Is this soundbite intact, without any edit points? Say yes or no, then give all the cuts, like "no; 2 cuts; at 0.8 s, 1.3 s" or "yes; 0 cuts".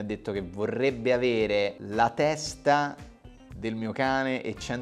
yes; 0 cuts